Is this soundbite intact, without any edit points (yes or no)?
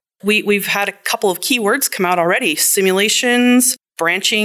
yes